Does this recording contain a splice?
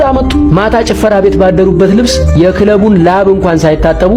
no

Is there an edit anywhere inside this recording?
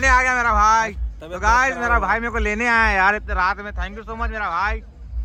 no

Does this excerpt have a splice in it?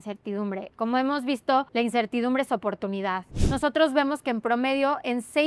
yes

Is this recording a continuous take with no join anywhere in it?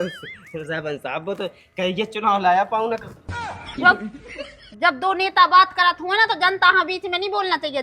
yes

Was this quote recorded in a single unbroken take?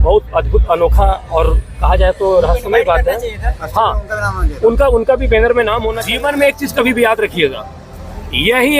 no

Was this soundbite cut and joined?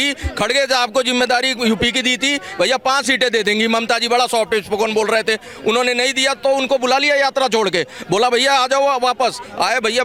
no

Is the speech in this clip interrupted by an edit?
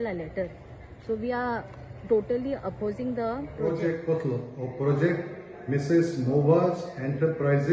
yes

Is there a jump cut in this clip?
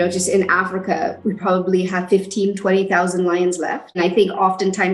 yes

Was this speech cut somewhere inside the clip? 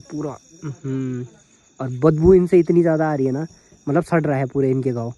no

